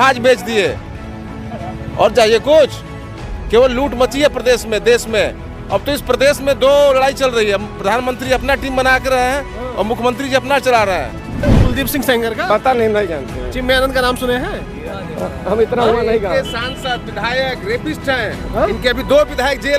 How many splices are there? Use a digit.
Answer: 1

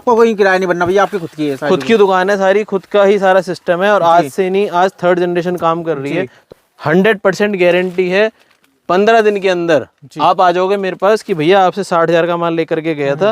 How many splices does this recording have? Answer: 1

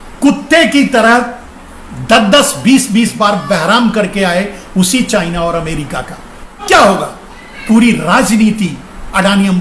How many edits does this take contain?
1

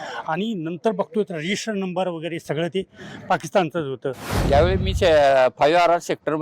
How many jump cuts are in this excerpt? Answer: 1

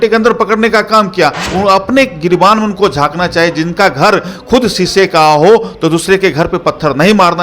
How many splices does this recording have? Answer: 1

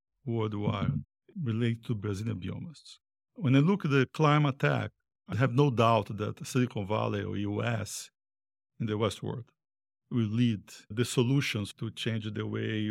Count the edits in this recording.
2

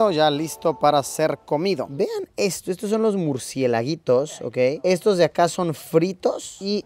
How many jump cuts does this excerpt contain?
0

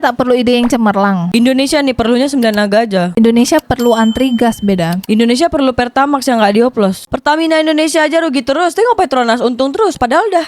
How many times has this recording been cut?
2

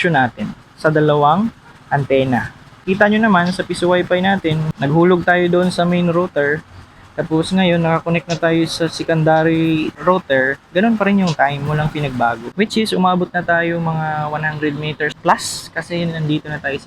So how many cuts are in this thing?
3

